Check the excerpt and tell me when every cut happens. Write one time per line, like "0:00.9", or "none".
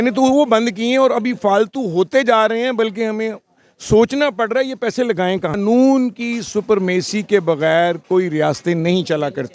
0:05.5

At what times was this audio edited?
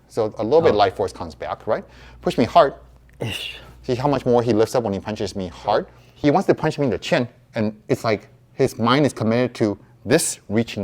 0:06.0

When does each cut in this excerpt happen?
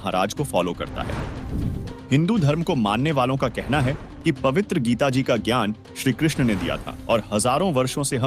0:06.9

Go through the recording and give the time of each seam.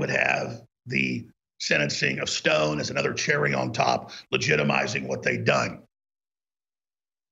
none

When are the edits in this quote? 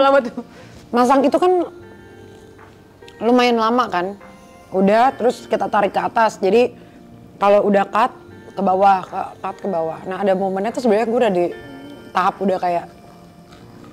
none

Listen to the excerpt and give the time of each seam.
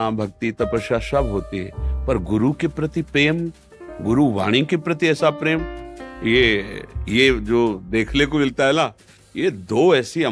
none

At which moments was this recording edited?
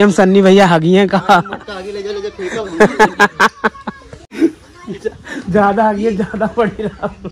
none

